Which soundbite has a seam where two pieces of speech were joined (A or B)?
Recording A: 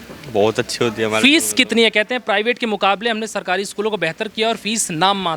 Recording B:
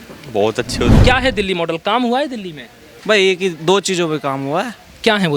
B